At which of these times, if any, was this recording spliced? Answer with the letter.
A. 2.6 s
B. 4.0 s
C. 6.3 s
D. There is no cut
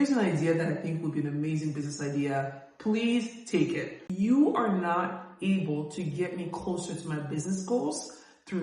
B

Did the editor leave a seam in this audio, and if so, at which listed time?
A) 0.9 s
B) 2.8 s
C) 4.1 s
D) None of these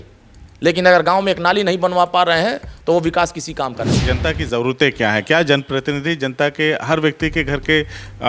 C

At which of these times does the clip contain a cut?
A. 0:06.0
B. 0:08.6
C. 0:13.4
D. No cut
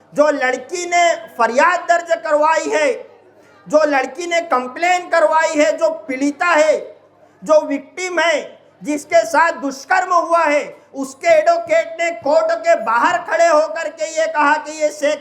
D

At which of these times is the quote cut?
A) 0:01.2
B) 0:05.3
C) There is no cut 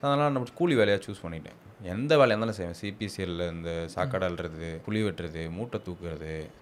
C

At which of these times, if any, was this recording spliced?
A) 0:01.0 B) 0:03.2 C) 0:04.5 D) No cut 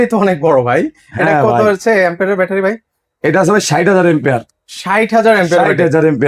D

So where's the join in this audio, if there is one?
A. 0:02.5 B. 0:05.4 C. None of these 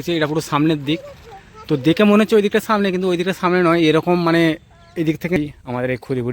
B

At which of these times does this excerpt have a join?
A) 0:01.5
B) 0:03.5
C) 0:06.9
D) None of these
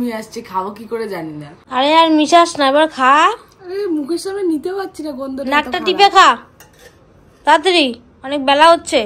A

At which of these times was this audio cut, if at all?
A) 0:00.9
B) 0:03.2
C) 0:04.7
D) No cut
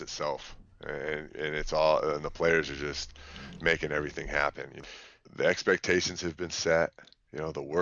C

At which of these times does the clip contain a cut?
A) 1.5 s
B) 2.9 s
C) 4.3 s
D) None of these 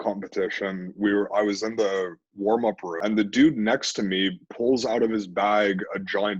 B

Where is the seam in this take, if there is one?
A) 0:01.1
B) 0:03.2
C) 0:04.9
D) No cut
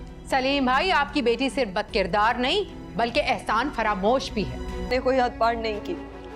C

